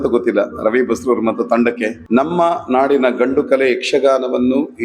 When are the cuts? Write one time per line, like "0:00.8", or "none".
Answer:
0:01.9